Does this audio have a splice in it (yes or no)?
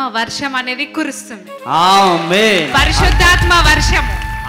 no